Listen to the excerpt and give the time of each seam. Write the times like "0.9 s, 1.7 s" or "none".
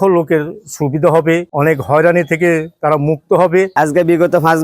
3.7 s